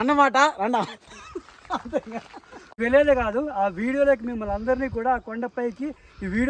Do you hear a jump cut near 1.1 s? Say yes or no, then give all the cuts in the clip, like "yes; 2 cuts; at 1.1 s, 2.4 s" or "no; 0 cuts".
no; 1 cut; at 2.8 s